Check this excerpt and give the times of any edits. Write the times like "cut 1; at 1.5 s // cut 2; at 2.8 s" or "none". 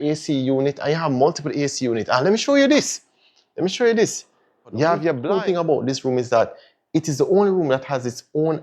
cut 1; at 5.2 s